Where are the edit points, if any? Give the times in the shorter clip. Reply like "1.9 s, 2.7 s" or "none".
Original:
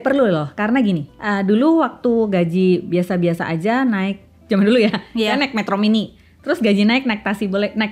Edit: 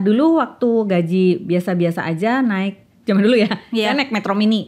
none